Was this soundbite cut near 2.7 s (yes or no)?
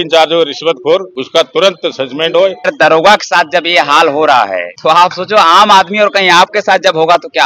yes